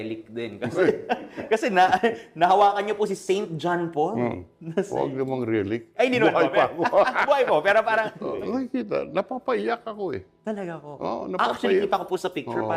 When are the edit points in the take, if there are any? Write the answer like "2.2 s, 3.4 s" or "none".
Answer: 8.2 s